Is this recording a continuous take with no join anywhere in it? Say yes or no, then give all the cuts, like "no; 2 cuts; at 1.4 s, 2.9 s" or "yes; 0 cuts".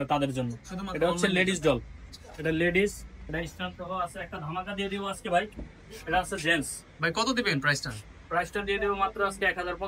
yes; 0 cuts